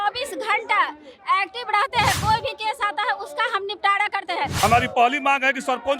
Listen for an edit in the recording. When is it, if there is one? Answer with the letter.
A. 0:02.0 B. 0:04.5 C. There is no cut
B